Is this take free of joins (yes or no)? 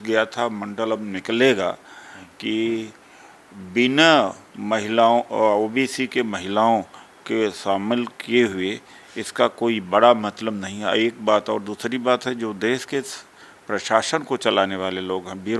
yes